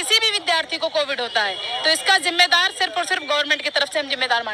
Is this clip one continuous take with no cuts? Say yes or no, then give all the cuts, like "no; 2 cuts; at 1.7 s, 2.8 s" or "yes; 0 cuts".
yes; 0 cuts